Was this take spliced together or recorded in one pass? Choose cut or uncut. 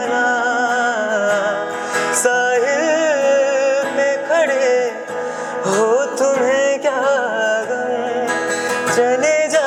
uncut